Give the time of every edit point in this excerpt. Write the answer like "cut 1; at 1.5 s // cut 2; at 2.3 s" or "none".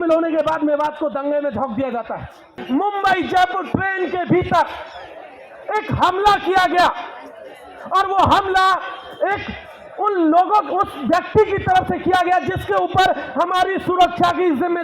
cut 1; at 2.6 s

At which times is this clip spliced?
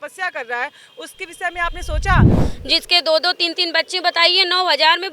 cut 1; at 2.4 s

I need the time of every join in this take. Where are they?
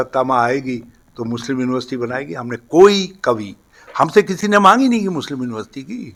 none

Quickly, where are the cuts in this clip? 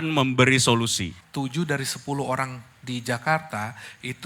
cut 1; at 1.1 s

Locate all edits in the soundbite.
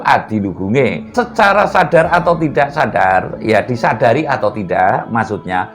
cut 1; at 1.0 s

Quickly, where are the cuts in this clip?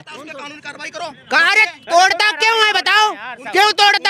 none

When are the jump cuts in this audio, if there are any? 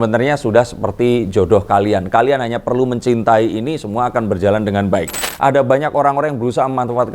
cut 1; at 5.2 s

